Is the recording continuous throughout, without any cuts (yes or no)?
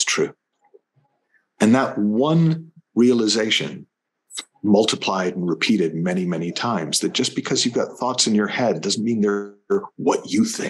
yes